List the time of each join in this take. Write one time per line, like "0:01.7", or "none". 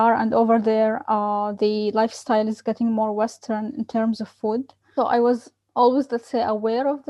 0:04.9